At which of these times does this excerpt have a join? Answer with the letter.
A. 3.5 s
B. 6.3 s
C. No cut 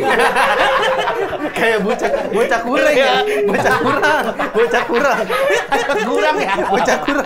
C